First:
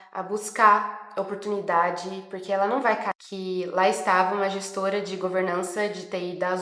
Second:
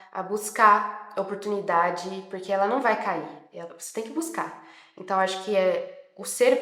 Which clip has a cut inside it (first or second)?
first